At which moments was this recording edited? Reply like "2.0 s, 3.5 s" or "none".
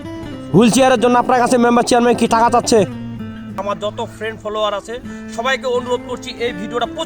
3.6 s